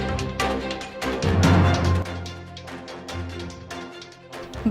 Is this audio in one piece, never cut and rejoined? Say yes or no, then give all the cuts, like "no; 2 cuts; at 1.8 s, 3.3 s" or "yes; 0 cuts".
yes; 0 cuts